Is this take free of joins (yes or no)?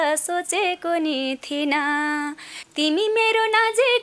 no